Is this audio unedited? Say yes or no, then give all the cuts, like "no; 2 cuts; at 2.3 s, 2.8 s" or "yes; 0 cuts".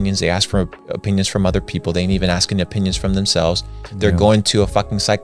yes; 0 cuts